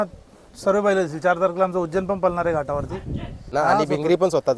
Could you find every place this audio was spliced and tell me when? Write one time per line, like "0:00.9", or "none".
0:03.5